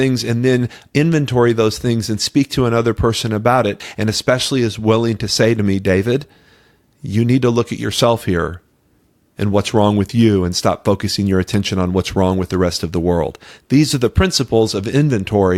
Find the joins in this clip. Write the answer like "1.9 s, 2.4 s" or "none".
3.8 s